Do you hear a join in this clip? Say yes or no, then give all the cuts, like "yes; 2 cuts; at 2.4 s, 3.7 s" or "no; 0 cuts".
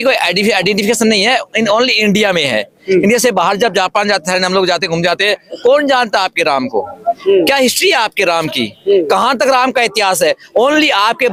no; 0 cuts